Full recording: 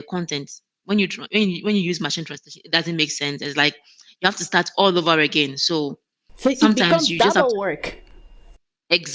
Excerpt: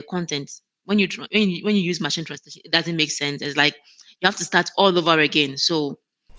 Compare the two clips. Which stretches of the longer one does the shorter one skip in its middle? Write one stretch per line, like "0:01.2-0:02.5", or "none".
none